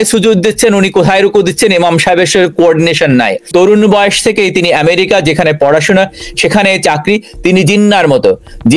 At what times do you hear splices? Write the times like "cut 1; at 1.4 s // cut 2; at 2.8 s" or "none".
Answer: cut 1; at 3.4 s